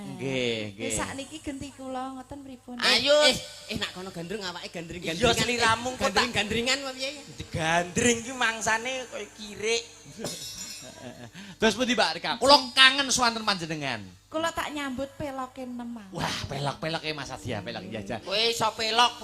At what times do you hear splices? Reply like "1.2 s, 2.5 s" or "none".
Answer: none